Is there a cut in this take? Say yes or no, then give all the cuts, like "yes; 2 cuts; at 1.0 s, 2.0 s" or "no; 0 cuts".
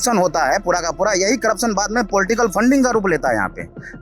no; 0 cuts